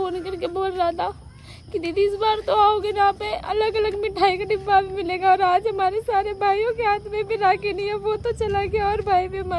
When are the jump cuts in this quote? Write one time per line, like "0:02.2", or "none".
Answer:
none